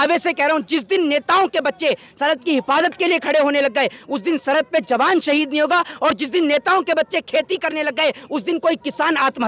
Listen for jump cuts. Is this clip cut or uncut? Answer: uncut